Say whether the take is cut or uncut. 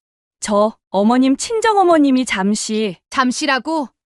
uncut